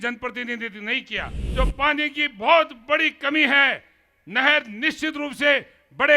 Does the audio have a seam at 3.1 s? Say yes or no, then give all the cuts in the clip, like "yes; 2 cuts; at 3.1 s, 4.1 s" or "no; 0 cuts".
no; 1 cut; at 1.4 s